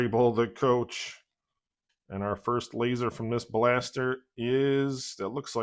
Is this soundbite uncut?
yes; 0 cuts

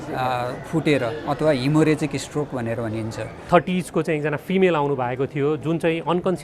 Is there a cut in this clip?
yes; 1 cut; at 3.4 s

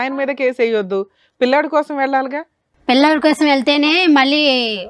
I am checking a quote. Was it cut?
no; 0 cuts

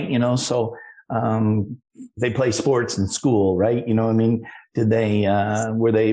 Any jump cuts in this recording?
no; 0 cuts

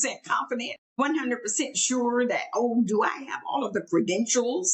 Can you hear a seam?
yes; 1 cut; at 1.0 s

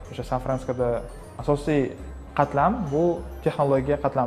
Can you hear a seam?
yes; 2 cuts; at 1.2 s, 2.0 s

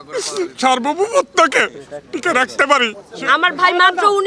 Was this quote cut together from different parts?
yes; 1 cut; at 3.0 s

